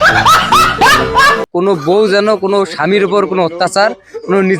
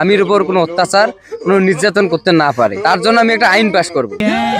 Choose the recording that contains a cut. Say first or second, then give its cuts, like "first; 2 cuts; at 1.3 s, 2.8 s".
first; 1 cut; at 1.5 s